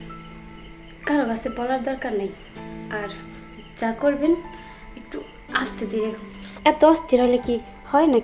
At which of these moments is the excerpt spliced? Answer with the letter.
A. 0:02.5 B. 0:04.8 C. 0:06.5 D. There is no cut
C